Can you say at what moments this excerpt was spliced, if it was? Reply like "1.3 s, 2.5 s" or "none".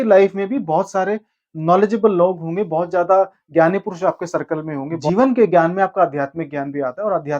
5.0 s

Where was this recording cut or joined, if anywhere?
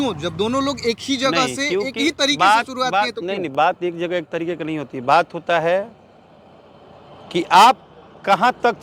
none

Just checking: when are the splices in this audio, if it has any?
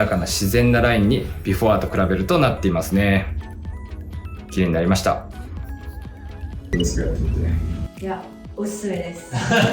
6.5 s

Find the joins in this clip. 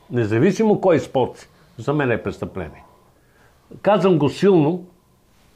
none

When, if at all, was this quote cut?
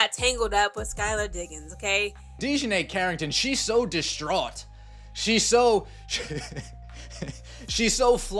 2.2 s

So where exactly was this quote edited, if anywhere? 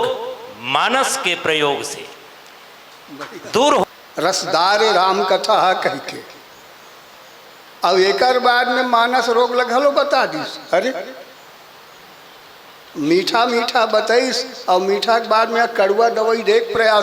3.8 s

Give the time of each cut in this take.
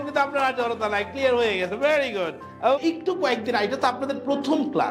2.8 s

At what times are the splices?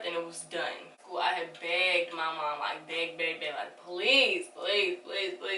1.0 s

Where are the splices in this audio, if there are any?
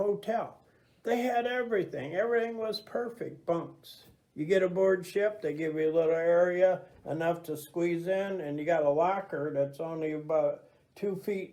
none

